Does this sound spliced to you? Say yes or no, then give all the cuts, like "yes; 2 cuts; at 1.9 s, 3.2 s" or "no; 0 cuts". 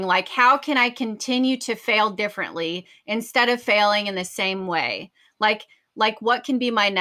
no; 0 cuts